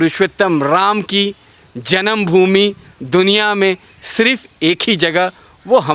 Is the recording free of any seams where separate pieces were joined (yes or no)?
yes